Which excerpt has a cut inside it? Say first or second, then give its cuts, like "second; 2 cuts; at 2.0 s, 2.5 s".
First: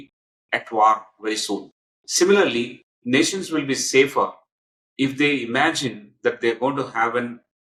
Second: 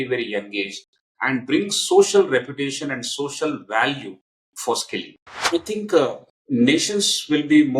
second; 2 cuts; at 5.3 s, 6.3 s